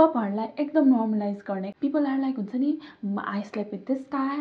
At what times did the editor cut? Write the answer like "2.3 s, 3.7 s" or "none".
1.6 s